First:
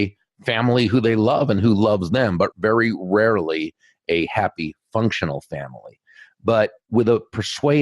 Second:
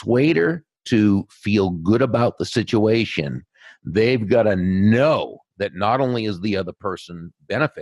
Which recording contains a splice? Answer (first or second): first